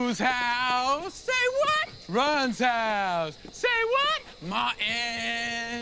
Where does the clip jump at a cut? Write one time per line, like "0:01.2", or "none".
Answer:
none